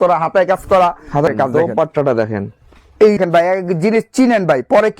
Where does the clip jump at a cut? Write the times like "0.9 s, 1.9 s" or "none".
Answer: 1.3 s, 3.2 s